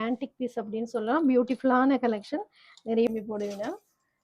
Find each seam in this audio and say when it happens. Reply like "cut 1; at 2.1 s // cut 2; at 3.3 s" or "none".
cut 1; at 3.1 s